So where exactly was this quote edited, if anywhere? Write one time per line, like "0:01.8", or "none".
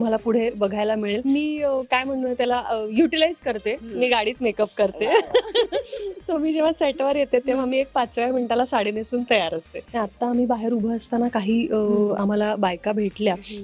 0:01.2
0:09.8